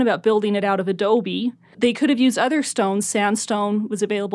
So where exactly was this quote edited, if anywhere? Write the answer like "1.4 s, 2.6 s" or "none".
1.6 s